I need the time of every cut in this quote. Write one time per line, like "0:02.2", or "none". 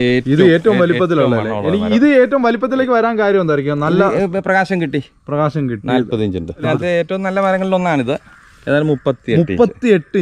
0:06.7